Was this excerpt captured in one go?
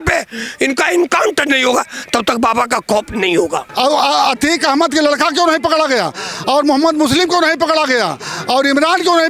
no; 1 cut; at 3.7 s

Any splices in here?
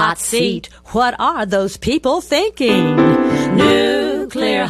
no; 0 cuts

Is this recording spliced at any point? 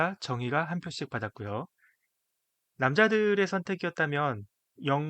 no; 0 cuts

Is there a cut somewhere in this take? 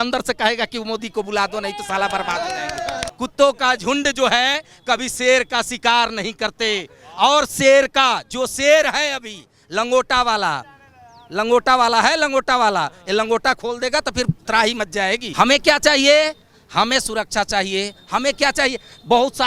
yes; 2 cuts; at 3.0 s, 15.3 s

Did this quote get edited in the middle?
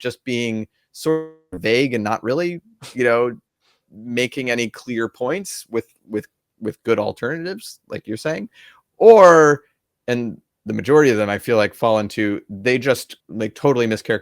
yes; 1 cut; at 13.2 s

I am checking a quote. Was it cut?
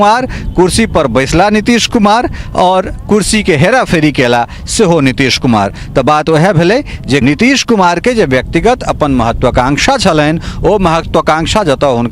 yes; 1 cut; at 7.2 s

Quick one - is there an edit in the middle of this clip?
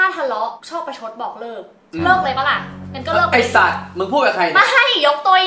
no; 0 cuts

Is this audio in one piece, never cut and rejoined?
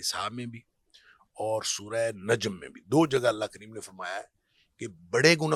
yes; 0 cuts

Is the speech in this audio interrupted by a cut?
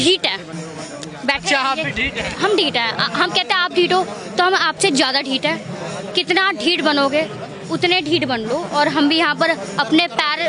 no; 0 cuts

